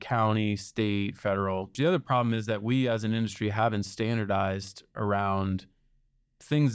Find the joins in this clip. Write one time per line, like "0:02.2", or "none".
0:01.7